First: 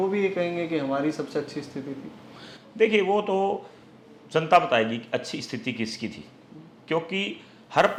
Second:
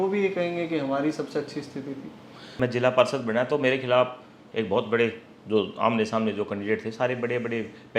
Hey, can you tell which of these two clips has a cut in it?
second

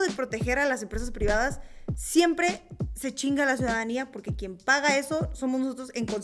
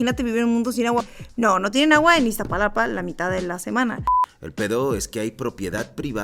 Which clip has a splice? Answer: second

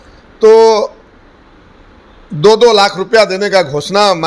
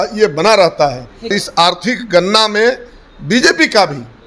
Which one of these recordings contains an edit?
second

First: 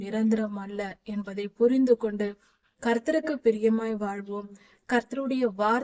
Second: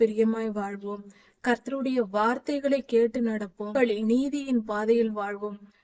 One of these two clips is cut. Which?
second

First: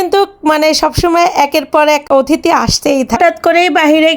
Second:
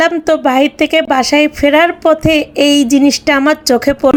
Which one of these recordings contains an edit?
first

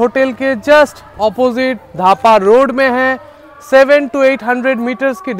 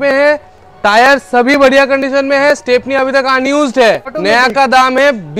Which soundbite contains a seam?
second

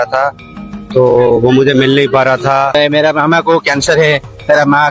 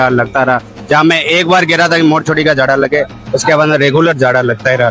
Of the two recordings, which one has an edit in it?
first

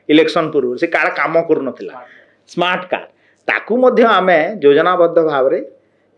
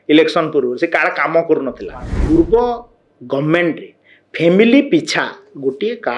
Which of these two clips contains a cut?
second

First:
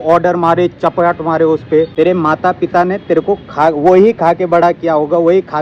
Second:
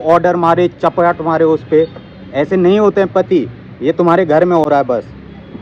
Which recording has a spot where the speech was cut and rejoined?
first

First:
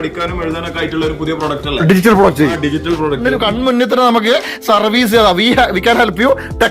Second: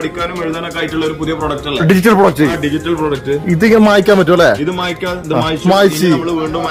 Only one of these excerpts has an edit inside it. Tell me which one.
first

